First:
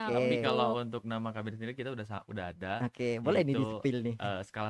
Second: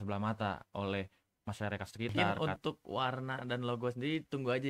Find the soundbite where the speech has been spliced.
second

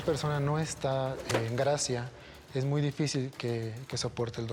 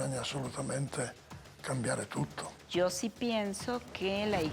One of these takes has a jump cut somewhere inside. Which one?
second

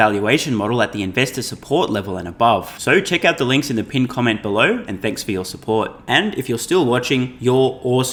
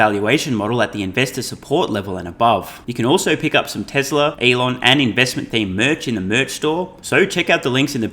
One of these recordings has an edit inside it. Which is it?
second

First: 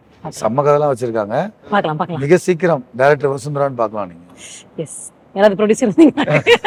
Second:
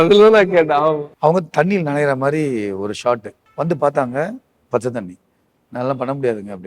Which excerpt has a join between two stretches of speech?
second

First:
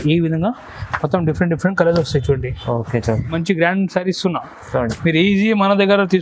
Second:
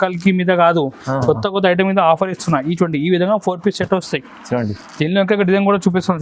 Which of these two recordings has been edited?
first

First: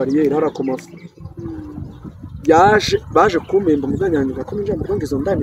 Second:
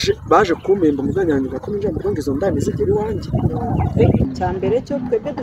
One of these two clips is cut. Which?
second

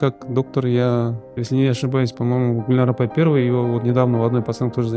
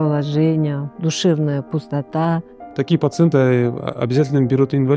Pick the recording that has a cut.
second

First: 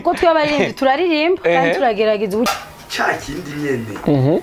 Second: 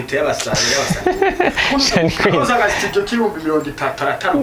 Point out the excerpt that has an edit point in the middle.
first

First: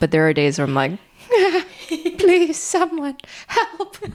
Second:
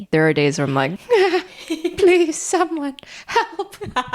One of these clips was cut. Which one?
second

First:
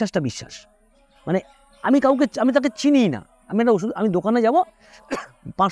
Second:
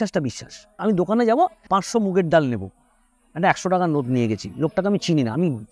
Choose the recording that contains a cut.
second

